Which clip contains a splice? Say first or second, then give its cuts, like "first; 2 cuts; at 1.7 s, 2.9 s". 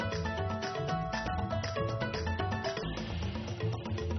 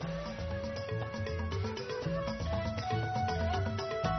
first; 1 cut; at 1.2 s